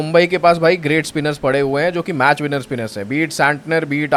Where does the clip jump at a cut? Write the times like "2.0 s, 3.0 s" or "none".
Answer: none